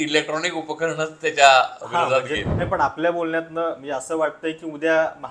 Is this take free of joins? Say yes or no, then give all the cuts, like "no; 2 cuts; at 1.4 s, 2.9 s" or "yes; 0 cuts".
no; 1 cut; at 2.4 s